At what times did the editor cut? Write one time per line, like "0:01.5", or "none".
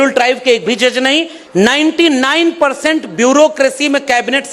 0:01.4